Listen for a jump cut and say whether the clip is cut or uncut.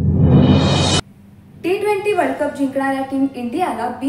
uncut